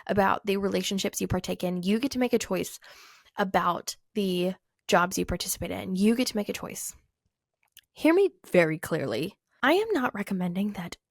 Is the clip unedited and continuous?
no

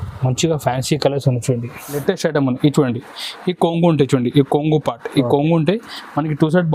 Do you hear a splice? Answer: yes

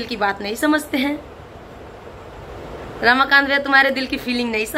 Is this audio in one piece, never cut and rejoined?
yes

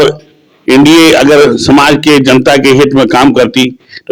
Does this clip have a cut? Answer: no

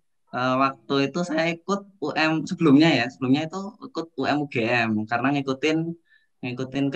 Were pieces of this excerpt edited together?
no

